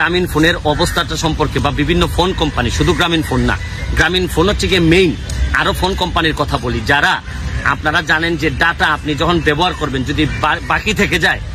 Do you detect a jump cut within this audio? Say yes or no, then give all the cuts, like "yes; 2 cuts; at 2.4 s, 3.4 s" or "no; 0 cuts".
no; 0 cuts